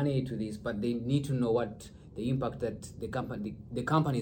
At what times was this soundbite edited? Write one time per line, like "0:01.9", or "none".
none